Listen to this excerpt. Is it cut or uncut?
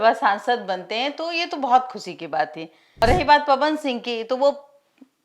cut